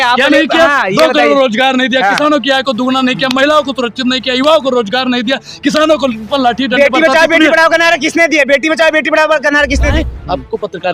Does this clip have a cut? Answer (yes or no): yes